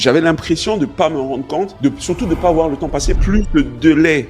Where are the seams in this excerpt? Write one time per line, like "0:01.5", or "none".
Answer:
0:01.7
0:03.1